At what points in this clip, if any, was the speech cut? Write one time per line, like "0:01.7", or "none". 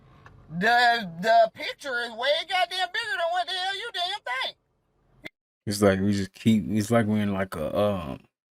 none